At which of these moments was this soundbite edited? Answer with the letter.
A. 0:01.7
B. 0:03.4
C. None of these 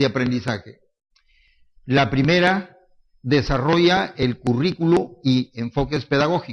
B